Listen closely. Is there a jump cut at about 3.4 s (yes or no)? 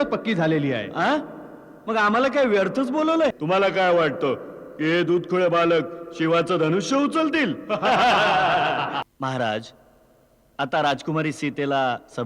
yes